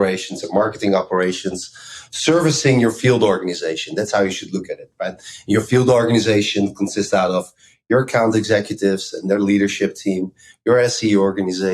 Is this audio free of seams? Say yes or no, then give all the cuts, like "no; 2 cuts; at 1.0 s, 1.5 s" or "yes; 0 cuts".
yes; 0 cuts